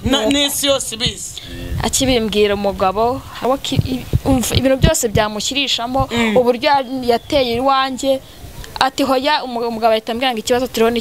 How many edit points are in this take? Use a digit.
1